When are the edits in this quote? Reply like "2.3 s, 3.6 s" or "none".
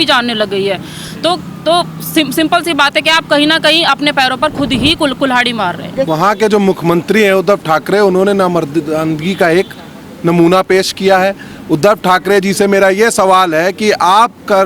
6.1 s